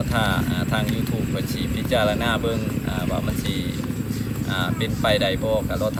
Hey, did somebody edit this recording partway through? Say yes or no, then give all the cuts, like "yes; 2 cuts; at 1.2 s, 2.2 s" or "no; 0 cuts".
no; 0 cuts